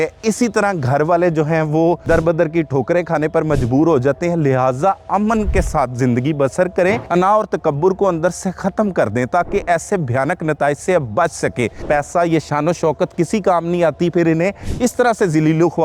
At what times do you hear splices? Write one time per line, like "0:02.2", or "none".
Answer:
0:02.0
0:07.0
0:11.8

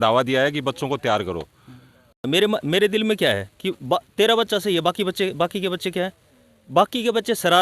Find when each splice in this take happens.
0:02.2

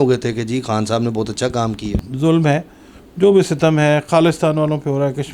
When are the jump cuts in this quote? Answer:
0:01.9

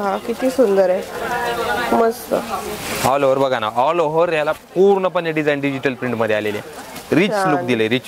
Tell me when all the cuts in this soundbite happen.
none

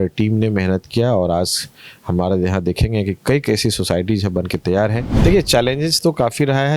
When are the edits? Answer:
0:05.1

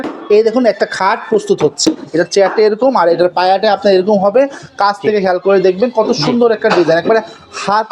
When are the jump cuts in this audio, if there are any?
0:02.0

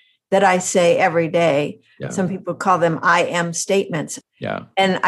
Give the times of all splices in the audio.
0:04.1

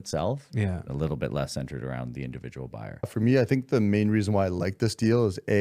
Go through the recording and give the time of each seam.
0:03.1

